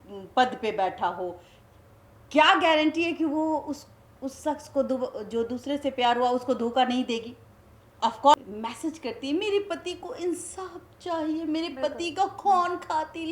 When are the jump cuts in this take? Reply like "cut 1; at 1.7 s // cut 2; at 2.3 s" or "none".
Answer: cut 1; at 8.3 s